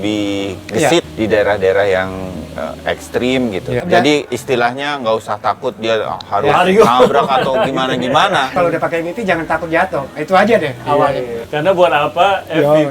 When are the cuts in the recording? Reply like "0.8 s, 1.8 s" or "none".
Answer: 1.1 s, 3.8 s, 8.5 s, 11.4 s